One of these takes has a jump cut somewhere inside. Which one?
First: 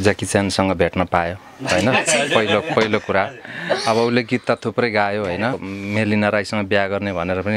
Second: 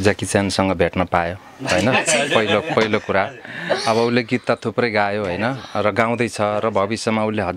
first; 1 cut; at 5.6 s

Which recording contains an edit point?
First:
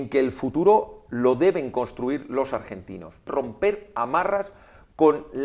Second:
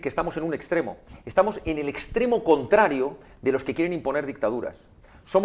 first; 1 cut; at 3.3 s

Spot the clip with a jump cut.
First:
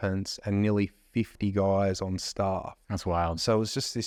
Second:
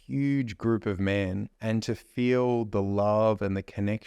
second; 1 cut; at 1.5 s

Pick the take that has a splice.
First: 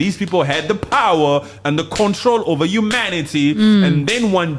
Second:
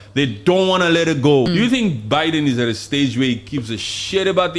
second; 1 cut; at 1.5 s

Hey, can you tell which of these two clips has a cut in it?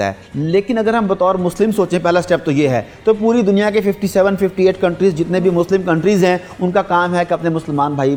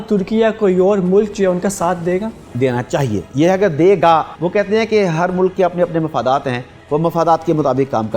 second; 3 cuts; at 2.4 s, 3.3 s, 4.4 s

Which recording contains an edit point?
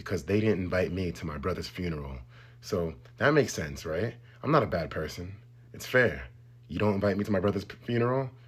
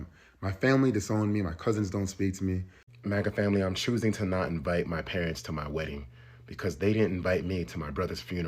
second; 1 cut; at 2.8 s

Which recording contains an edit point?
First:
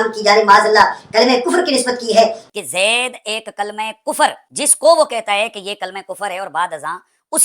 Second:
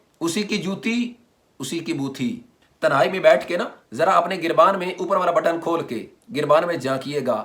first; 1 cut; at 2.4 s

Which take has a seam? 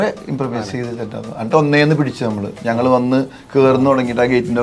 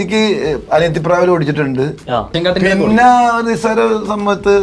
second; 1 cut; at 2.3 s

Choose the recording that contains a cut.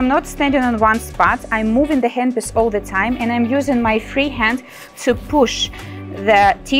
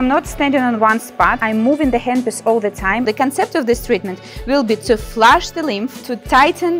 second; 2 cuts; at 1.4 s, 3.1 s

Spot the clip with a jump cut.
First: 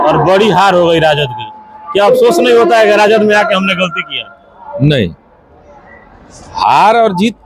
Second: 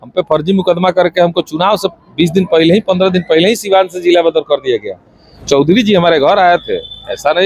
second; 1 cut; at 5.3 s

